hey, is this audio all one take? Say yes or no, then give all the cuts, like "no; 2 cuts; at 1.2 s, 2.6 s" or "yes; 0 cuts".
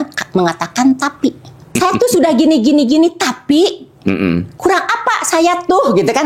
no; 1 cut; at 1.7 s